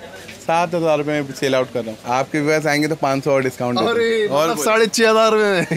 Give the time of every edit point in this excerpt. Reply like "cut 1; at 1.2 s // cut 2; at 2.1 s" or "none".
cut 1; at 2.0 s

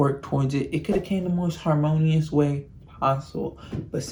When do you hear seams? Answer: none

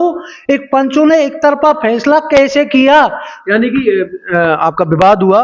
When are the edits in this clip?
none

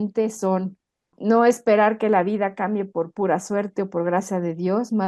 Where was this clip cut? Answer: cut 1; at 1.1 s

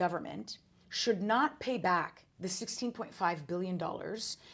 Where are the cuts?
none

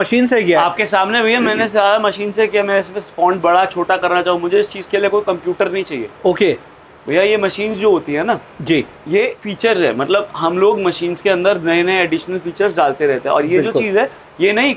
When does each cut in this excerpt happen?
none

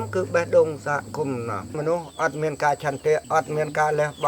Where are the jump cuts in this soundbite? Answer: cut 1; at 1.8 s

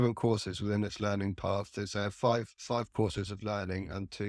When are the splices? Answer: none

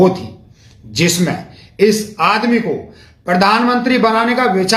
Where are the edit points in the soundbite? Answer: none

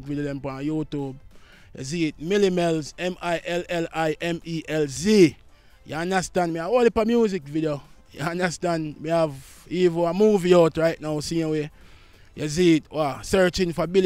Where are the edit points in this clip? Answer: none

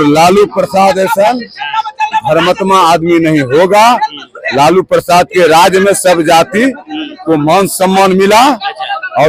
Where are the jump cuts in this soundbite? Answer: none

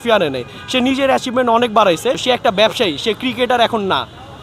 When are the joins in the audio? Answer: cut 1; at 2.2 s

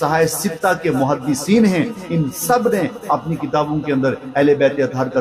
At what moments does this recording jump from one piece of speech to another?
none

